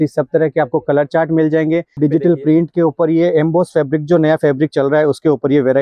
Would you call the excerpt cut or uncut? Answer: cut